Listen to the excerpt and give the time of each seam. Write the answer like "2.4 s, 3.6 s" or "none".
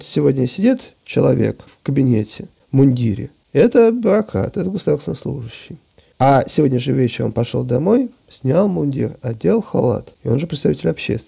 none